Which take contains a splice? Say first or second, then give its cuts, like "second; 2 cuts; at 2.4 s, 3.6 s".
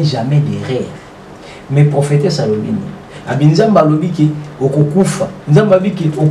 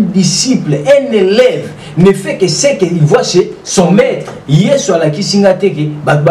second; 1 cut; at 4.3 s